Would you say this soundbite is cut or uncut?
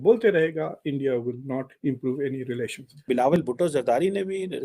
cut